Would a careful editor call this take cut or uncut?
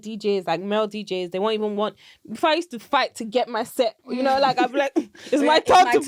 uncut